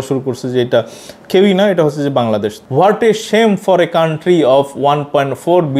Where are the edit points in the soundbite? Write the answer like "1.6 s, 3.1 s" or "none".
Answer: 2.5 s